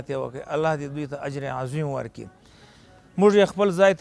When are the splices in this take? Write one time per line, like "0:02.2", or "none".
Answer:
none